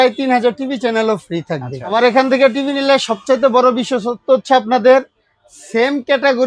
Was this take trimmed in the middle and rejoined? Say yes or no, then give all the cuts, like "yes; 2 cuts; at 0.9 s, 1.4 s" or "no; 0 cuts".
yes; 1 cut; at 1.9 s